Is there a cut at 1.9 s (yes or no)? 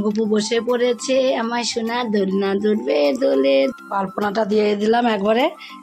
no